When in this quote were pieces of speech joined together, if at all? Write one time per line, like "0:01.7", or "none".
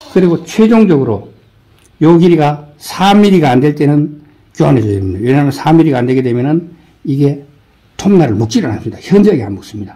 none